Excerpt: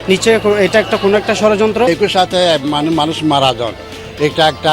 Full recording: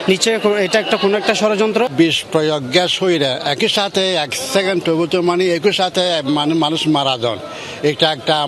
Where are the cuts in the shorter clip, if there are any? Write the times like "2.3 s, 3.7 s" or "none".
1.9 s